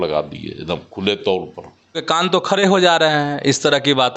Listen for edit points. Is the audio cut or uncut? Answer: cut